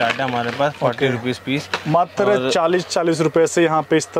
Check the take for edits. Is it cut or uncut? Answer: uncut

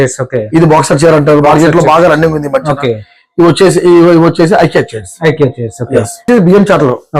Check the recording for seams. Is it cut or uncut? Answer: cut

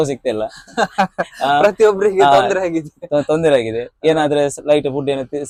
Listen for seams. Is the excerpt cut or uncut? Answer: uncut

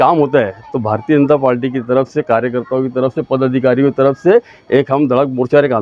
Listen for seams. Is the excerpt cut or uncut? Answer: uncut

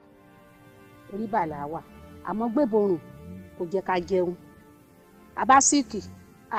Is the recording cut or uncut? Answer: uncut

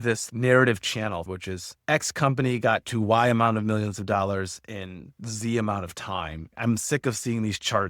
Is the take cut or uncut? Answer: cut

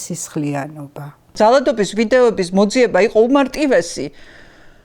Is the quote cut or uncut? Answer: cut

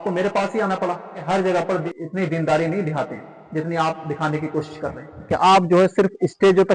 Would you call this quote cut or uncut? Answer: cut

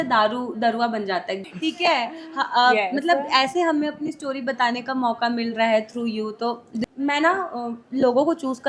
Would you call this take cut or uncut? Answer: cut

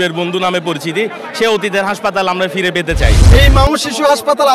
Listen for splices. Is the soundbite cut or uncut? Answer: cut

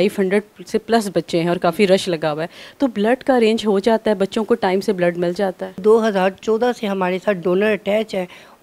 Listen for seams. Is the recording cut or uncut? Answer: cut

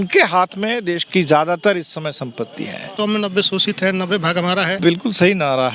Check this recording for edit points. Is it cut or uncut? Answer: cut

